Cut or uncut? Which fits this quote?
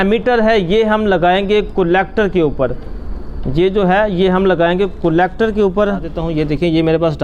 cut